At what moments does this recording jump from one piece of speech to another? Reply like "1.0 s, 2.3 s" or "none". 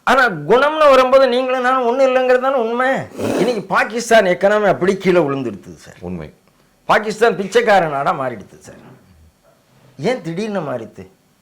3.2 s